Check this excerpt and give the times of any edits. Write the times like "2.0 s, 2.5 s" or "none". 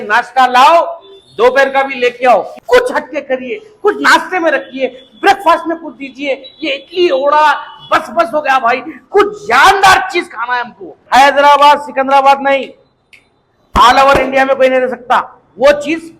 2.5 s, 10.9 s